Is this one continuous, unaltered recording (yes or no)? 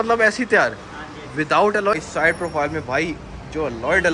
no